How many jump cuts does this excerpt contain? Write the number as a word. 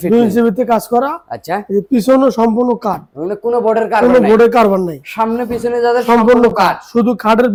zero